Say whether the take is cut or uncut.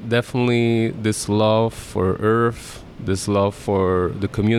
cut